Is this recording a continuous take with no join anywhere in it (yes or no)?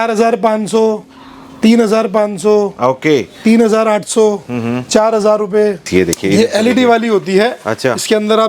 no